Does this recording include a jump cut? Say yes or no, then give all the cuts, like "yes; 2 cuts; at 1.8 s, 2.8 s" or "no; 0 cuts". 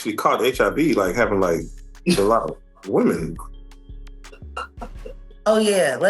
no; 0 cuts